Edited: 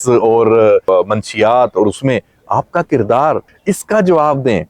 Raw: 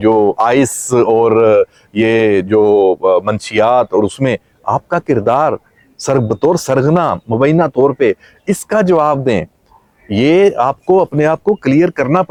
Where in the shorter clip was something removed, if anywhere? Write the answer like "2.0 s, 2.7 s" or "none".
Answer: 0.8 s, 3.5 s